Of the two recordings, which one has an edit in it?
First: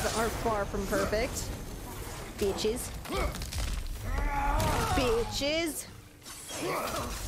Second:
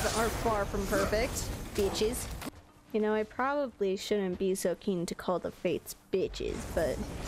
second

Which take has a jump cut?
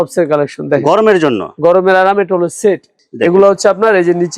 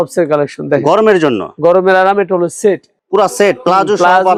first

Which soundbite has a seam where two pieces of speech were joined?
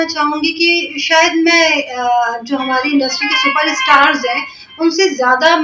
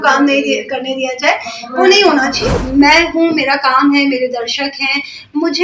second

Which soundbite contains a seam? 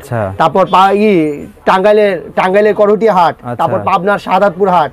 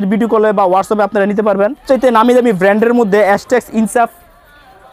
second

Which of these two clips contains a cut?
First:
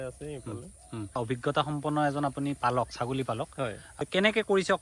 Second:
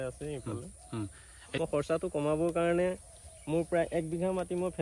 second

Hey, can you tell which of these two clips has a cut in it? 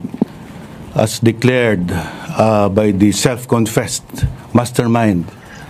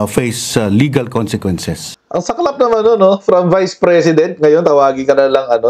second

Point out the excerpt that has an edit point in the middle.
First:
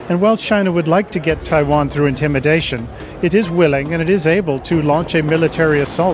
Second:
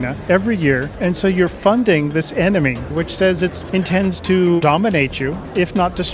second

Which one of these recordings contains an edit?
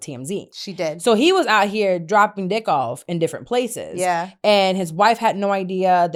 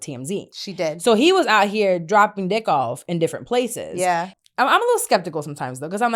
second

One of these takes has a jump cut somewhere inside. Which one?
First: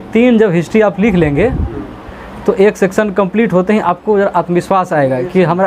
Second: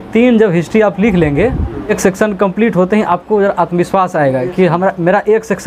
second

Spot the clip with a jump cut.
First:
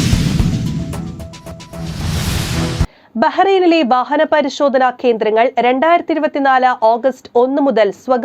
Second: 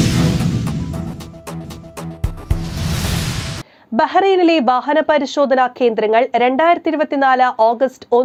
first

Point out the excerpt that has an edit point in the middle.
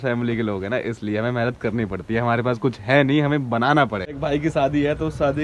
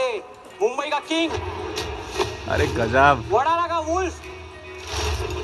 first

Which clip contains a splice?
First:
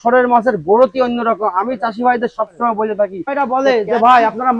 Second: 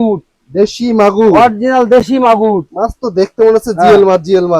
first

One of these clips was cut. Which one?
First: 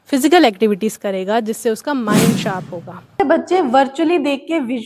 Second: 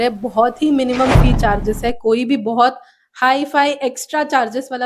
first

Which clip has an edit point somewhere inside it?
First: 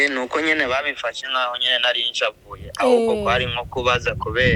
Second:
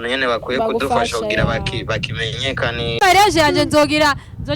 second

